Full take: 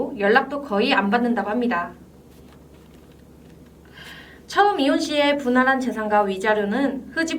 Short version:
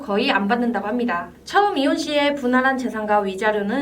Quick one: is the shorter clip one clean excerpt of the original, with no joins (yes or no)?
no